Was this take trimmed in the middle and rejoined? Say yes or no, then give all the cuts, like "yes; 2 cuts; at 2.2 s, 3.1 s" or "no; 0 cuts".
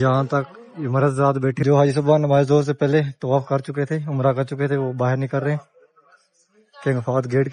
yes; 1 cut; at 1.6 s